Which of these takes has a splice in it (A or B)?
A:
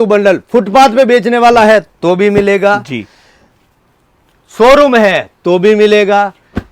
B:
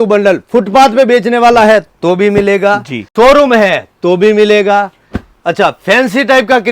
B